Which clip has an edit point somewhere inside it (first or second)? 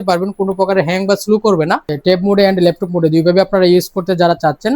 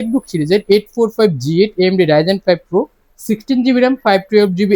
first